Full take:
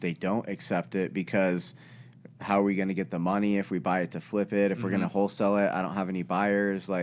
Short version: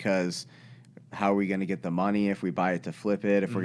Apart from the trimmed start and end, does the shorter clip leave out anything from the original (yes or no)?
no